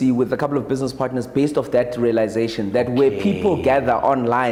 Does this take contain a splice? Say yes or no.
no